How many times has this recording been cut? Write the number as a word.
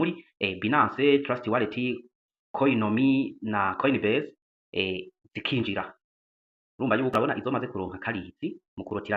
one